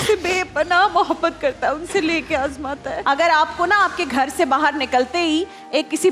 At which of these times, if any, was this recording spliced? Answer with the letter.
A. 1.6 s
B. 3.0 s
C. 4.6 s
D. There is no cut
B